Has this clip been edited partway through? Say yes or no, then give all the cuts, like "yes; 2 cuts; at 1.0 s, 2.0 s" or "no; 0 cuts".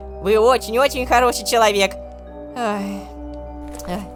no; 0 cuts